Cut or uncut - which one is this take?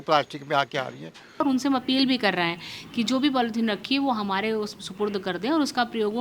cut